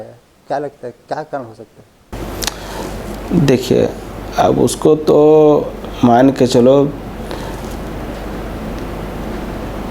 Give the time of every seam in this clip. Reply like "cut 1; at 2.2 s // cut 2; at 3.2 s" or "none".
none